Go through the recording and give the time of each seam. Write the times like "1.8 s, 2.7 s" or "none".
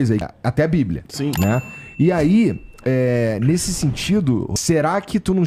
none